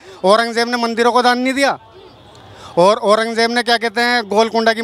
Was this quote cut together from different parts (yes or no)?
no